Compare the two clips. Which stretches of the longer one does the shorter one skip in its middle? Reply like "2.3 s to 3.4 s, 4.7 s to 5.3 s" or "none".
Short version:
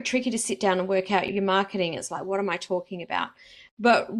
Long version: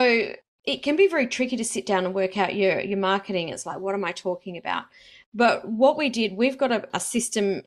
2.5 s to 2.8 s